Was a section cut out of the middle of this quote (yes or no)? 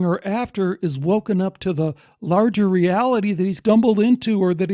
yes